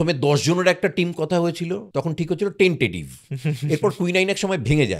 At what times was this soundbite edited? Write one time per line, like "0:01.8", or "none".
0:01.8